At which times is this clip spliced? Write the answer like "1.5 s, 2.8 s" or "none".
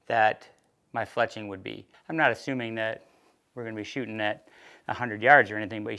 1.9 s